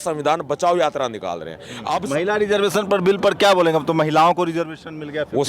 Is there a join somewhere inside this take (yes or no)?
yes